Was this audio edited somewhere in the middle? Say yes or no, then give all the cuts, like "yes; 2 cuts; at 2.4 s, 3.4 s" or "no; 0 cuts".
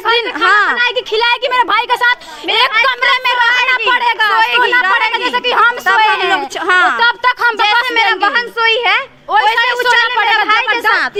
no; 0 cuts